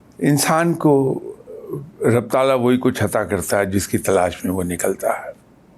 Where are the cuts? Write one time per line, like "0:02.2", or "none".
none